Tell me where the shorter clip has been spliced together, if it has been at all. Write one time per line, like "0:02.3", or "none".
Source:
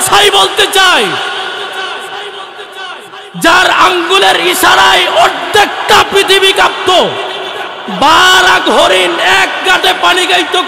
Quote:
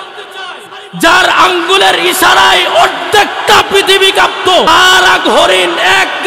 0:04.7